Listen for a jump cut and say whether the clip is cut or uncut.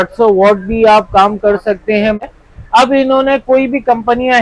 cut